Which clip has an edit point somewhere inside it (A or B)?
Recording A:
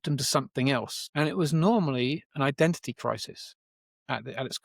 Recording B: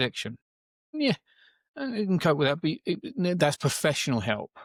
A